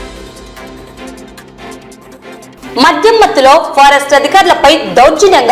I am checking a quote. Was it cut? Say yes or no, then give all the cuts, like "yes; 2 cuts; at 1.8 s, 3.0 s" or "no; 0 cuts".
yes; 1 cut; at 2.0 s